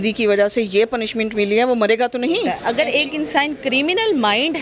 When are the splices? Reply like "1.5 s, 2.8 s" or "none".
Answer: 2.6 s